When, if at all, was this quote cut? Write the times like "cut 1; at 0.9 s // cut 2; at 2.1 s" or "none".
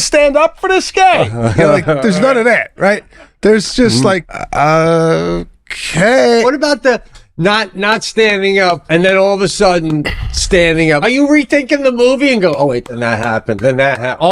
cut 1; at 4.4 s // cut 2; at 6.4 s // cut 3; at 8.8 s // cut 4; at 11.0 s